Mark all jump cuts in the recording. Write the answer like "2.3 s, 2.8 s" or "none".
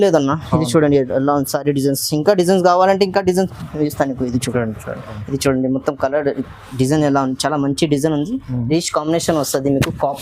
5.1 s